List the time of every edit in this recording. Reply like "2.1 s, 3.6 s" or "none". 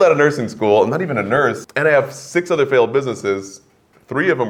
1.7 s

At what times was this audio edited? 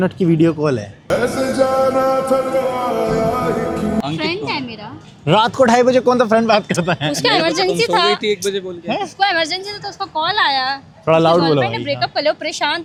none

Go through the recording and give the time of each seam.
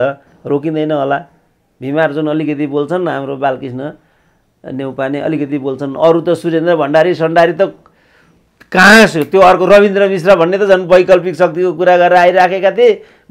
none

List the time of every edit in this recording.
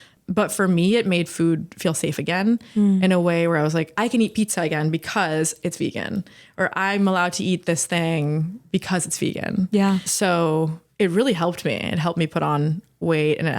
3.9 s, 10.1 s

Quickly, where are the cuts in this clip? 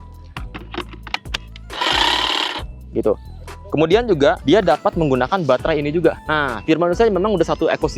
4.4 s

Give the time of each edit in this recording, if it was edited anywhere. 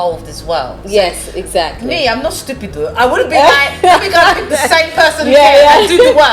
none

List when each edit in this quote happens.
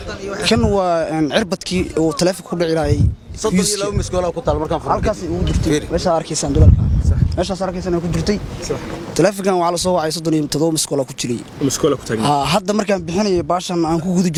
none

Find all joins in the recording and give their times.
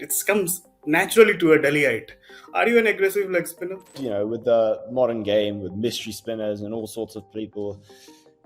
3.9 s

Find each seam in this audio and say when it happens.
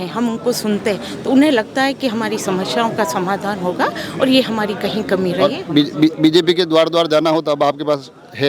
none

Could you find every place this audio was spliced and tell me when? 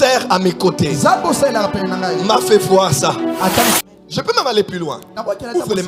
3.8 s

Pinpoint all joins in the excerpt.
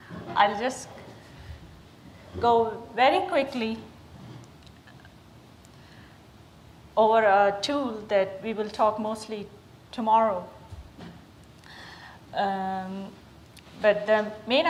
none

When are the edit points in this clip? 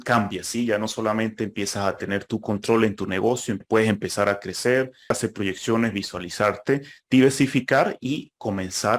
3.6 s, 5.2 s

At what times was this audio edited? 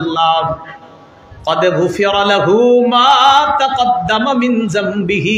none

